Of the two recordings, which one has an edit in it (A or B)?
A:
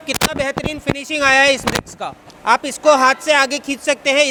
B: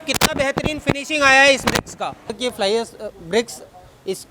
B